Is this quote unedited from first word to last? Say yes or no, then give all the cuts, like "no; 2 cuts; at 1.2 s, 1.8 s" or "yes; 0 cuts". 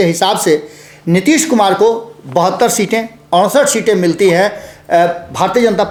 yes; 0 cuts